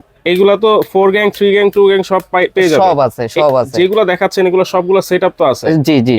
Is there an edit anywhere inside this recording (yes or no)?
no